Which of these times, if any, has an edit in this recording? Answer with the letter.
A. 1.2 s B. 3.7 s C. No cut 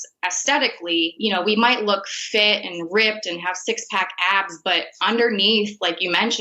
A